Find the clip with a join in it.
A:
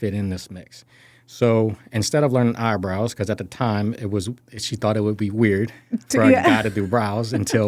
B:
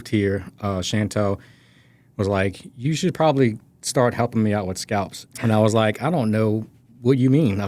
B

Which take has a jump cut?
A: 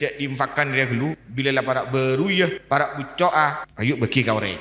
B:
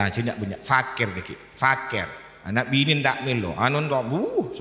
A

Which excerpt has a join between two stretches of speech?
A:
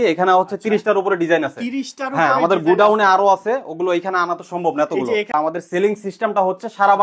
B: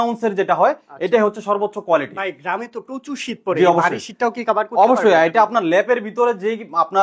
A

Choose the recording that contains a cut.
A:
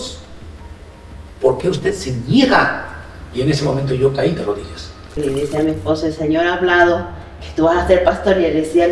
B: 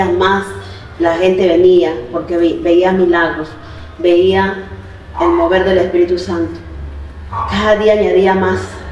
A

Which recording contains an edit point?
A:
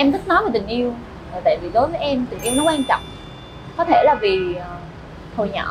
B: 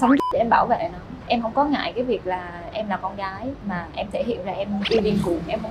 B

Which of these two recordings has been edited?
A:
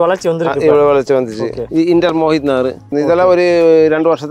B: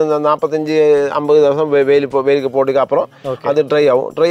A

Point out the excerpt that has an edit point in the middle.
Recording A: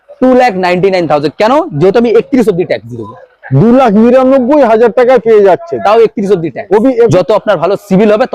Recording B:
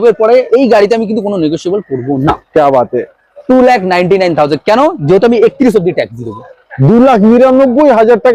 A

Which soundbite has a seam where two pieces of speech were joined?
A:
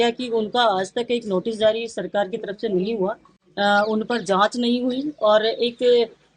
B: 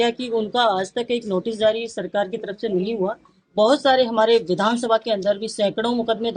B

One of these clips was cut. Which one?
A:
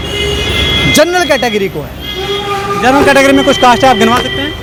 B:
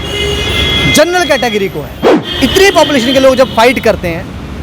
B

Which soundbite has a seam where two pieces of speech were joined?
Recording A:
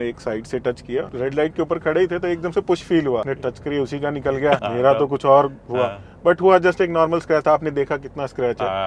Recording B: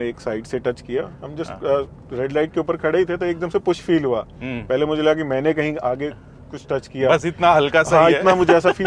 A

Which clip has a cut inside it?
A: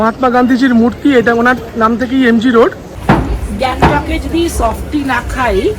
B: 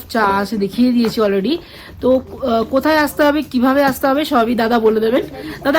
A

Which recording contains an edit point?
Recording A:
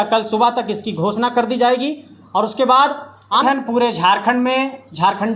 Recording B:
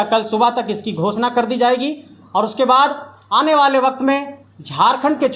A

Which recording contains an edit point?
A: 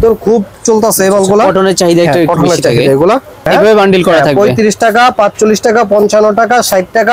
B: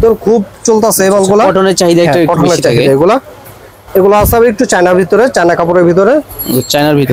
A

